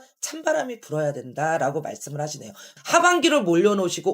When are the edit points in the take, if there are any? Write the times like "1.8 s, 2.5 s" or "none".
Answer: 2.7 s